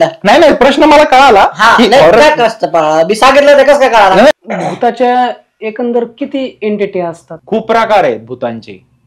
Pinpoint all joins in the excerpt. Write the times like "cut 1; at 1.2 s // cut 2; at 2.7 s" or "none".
cut 1; at 4.3 s // cut 2; at 7.3 s